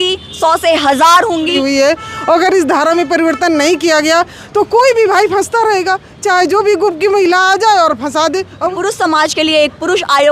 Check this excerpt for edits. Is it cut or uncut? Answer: cut